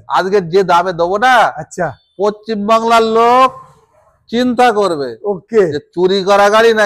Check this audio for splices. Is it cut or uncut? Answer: uncut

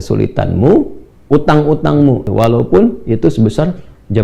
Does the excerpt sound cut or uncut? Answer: cut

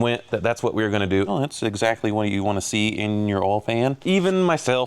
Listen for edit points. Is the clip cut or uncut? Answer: cut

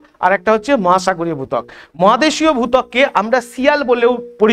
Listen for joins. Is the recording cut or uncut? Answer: uncut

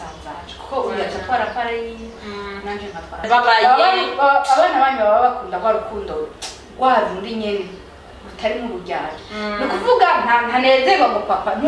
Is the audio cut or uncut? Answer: cut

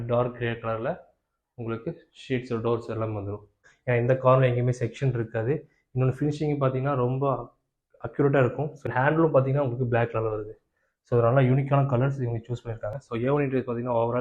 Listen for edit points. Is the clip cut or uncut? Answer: cut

